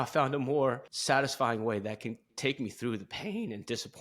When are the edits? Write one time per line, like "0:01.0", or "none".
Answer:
0:00.9